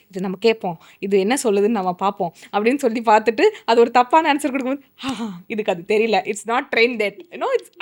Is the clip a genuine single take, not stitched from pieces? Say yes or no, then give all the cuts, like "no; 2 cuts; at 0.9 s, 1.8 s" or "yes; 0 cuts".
yes; 0 cuts